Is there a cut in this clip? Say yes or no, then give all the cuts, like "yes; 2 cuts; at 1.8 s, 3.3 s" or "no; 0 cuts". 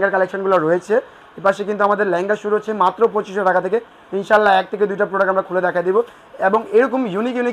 no; 0 cuts